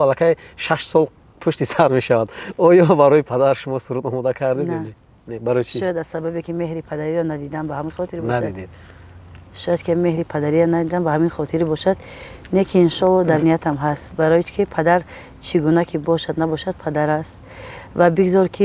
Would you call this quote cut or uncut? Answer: uncut